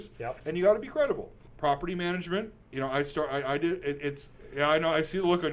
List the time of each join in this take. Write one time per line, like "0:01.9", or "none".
0:01.4